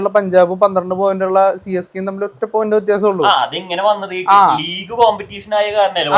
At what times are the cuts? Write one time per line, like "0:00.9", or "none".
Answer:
none